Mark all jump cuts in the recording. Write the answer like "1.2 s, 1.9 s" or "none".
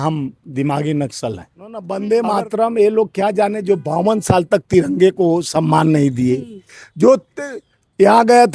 1.9 s

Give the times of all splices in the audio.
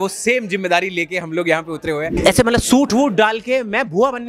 2.1 s

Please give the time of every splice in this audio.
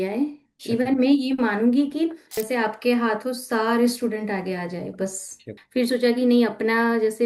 2.3 s, 5.5 s

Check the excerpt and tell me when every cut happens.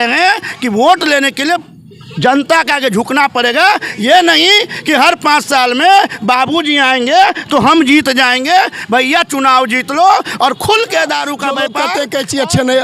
11.7 s

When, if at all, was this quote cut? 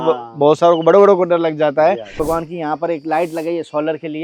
2.1 s

